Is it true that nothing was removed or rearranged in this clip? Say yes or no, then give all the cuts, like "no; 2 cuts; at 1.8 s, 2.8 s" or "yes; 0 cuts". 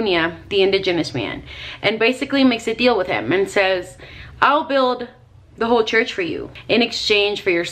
no; 1 cut; at 6.5 s